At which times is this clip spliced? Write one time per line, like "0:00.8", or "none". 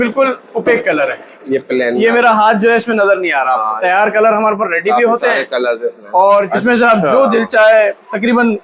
0:03.8
0:06.5